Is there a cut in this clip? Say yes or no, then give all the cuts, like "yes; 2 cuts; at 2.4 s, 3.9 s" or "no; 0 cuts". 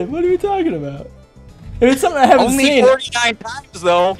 yes; 1 cut; at 2.6 s